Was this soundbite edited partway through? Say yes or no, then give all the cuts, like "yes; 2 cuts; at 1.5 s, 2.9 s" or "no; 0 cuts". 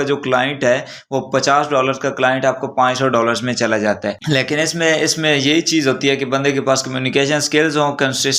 no; 0 cuts